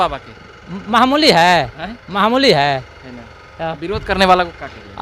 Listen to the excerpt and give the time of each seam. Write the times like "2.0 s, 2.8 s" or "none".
none